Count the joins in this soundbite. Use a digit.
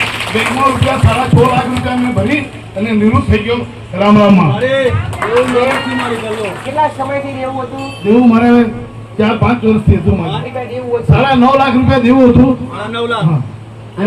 1